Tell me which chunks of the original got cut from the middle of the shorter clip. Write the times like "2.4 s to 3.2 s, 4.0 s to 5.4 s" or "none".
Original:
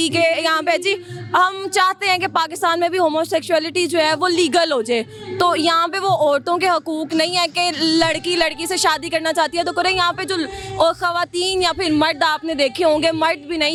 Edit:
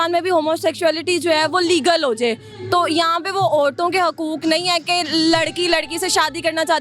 none